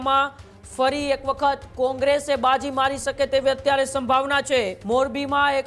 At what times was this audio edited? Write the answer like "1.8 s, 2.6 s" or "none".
4.8 s

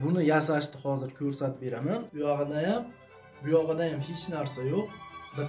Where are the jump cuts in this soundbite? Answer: 2.1 s

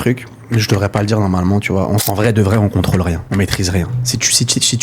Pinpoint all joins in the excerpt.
2.0 s, 3.2 s

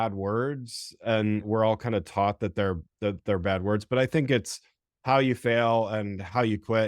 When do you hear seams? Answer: 1.5 s

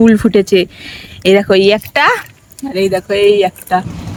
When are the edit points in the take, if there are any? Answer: none

